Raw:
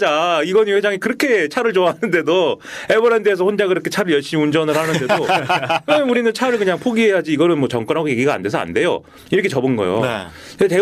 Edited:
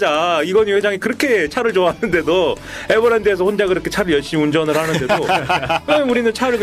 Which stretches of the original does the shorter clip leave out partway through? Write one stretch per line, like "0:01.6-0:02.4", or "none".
none

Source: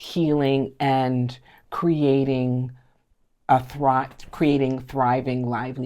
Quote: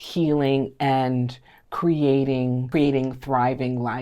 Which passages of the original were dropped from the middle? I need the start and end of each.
0:02.6-0:04.3

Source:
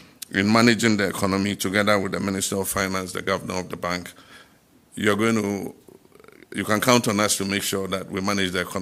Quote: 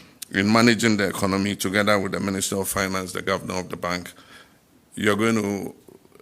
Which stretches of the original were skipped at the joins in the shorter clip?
none

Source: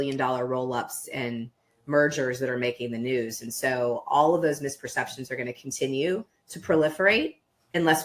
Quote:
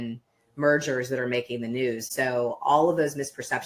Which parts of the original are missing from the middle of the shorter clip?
0:03.4-0:03.5

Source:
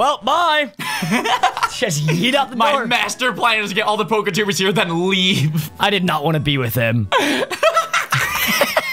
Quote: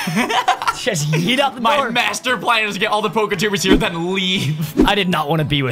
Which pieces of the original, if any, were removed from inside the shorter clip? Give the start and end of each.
none

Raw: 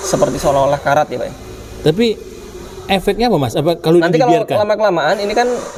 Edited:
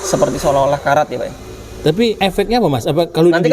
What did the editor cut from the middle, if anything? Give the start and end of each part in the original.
0:02.2-0:02.9

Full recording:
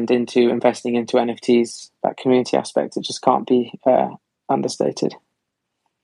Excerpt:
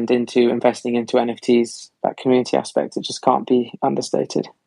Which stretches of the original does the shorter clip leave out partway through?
0:03.7-0:04.4

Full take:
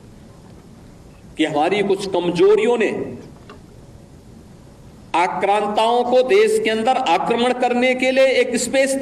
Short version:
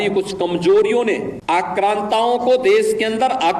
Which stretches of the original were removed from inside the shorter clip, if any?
0:02.6-0:04.6

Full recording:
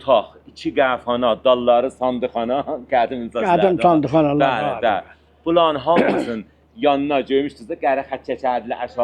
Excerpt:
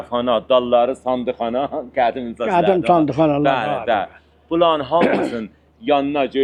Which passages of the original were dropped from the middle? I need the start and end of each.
none

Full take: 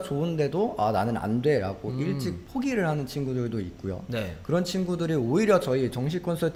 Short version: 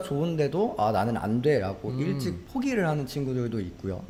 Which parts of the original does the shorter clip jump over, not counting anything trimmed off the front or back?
none

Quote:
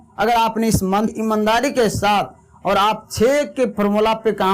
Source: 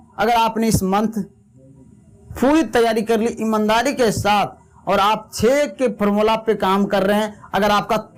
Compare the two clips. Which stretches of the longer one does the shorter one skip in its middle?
0:01.1-0:03.3

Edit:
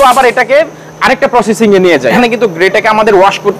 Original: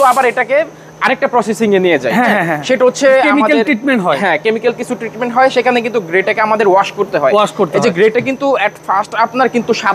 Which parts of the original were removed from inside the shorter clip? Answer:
0:02.2-0:05.7

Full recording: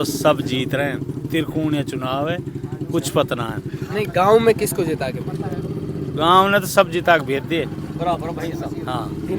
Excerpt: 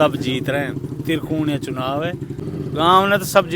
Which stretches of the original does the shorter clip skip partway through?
0:02.7-0:05.8

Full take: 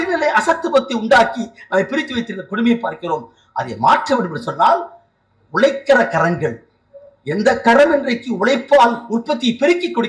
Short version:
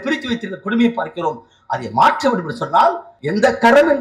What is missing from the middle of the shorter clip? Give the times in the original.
0:05.0-0:07.1

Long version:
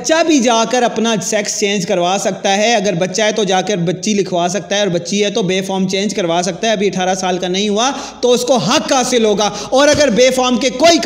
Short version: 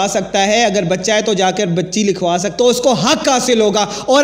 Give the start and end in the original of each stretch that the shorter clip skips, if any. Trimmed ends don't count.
0:04.6-0:08.1

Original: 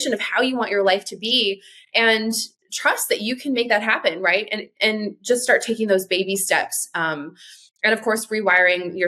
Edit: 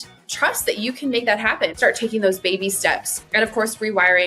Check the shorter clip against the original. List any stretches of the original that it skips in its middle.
0:04.2-0:05.4
0:06.8-0:07.6

